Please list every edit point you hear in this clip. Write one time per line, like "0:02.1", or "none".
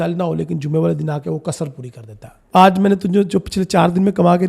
0:02.4